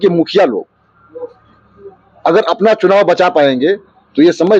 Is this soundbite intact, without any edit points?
yes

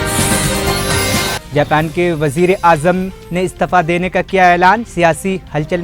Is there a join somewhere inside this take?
no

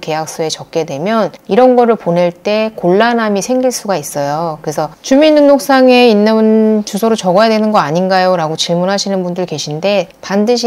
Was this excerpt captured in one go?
no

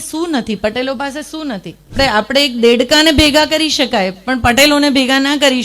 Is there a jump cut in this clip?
yes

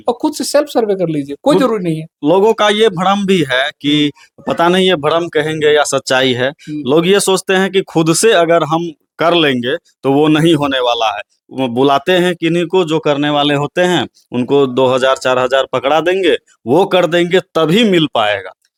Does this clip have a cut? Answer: no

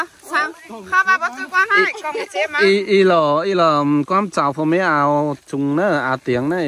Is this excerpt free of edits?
yes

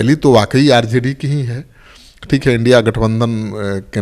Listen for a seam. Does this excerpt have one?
no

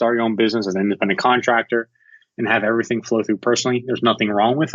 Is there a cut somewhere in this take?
no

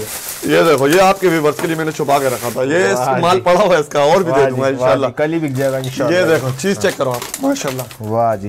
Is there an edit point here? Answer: no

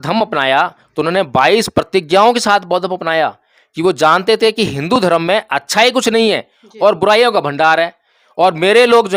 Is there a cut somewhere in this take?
no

